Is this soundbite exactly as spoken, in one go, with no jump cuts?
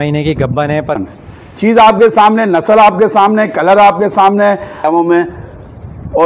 no; 2 cuts; at 1.0 s, 4.9 s

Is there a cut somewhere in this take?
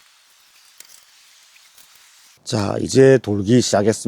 yes; 1 cut; at 2.4 s

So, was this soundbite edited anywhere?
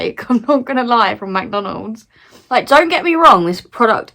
yes; 1 cut; at 2.4 s

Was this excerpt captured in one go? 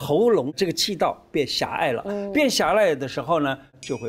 yes; 0 cuts

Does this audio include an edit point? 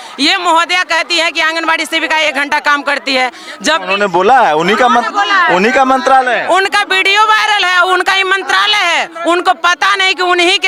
no; 0 cuts

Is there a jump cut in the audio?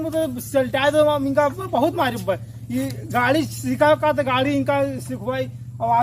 no; 0 cuts

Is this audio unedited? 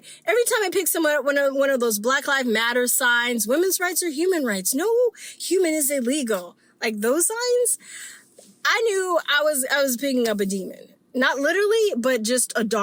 yes; 0 cuts

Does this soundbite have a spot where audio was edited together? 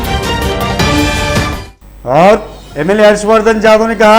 no; 0 cuts

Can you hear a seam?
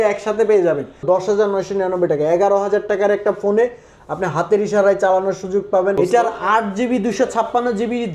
yes; 2 cuts; at 1.0 s, 6.0 s

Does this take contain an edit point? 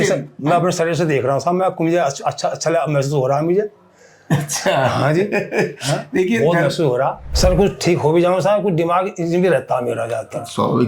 yes; 1 cut; at 7.2 s

